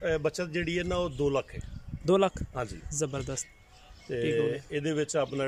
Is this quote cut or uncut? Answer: uncut